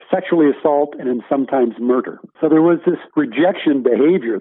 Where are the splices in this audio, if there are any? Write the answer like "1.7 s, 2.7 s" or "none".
2.2 s, 3.0 s